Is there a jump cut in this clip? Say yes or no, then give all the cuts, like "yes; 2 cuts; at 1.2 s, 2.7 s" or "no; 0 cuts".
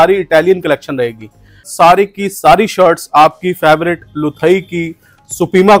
yes; 1 cut; at 1.7 s